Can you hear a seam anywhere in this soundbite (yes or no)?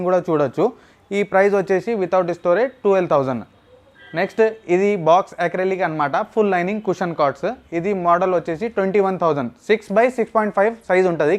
no